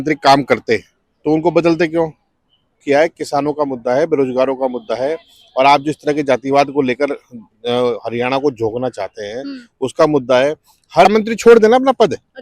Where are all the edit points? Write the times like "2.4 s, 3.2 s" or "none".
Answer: 2.8 s, 11.1 s